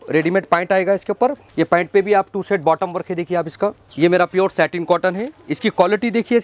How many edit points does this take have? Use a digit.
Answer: 2